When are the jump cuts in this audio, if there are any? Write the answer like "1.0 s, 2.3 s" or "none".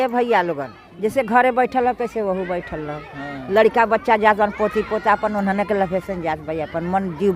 none